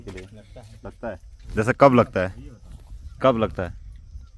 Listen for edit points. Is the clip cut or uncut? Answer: uncut